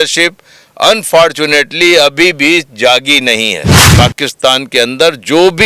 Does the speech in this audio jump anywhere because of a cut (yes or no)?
yes